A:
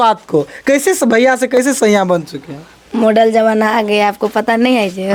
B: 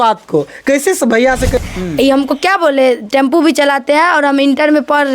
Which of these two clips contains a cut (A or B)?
B